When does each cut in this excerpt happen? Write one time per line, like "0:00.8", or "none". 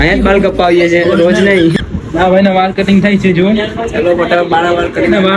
0:01.8